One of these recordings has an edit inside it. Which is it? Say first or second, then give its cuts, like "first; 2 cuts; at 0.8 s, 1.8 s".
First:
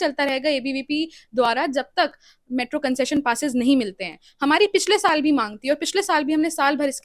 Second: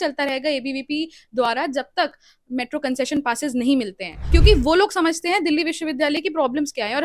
second; 1 cut; at 4.2 s